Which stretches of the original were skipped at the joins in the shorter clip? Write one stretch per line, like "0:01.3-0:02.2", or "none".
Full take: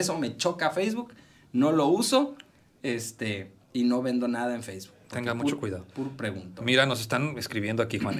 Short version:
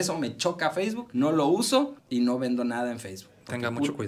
0:01.0-0:01.4
0:02.4-0:03.6